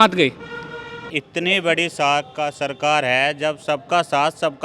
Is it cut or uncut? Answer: cut